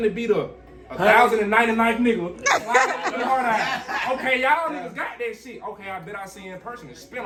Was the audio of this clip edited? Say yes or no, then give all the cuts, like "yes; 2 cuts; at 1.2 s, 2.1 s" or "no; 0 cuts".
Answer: no; 0 cuts